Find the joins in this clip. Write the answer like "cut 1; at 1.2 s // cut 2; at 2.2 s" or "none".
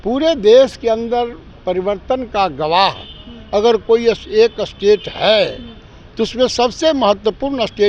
none